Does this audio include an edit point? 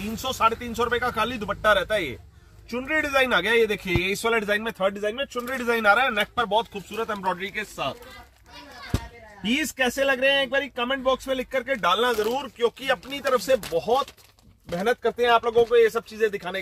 no; 0 cuts

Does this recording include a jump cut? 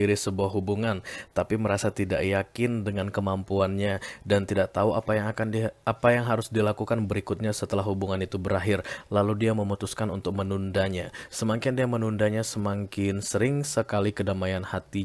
no; 0 cuts

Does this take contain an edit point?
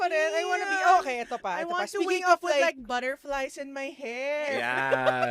no; 0 cuts

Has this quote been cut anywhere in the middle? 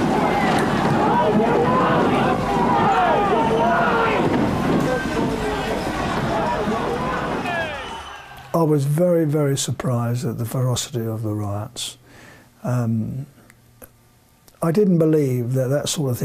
no; 0 cuts

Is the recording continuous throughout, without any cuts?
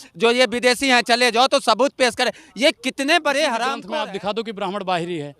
no; 1 cut; at 3.8 s

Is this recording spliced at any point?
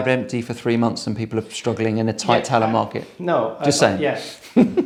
no; 0 cuts

